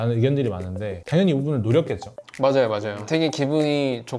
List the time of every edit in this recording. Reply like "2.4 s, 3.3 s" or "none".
1.0 s, 2.9 s

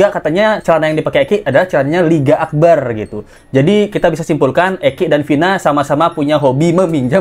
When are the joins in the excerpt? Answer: none

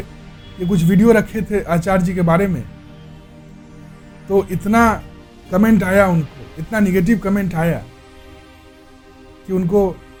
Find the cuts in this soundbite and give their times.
none

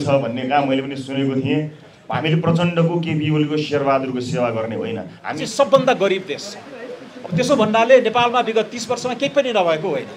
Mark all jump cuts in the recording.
2.0 s, 5.4 s

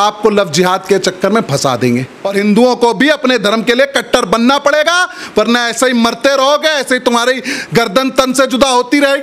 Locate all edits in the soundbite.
2.2 s

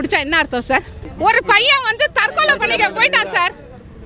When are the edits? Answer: 1.0 s

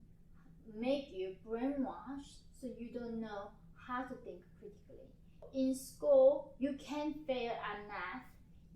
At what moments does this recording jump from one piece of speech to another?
5.5 s

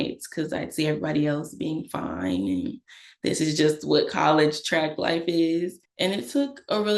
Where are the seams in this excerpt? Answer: 5.8 s

